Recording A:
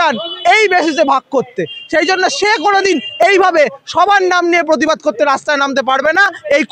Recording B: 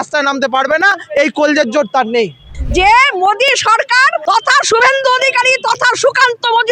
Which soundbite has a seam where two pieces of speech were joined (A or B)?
B